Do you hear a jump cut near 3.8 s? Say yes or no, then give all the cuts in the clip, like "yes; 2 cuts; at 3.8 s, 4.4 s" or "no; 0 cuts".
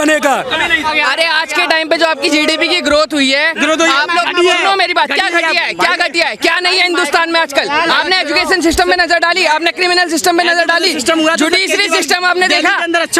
no; 1 cut; at 0.9 s